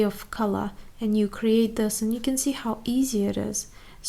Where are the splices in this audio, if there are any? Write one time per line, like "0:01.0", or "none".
none